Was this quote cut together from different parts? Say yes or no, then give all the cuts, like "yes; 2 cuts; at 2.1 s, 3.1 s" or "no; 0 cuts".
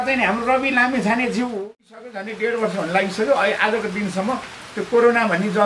yes; 1 cut; at 2.1 s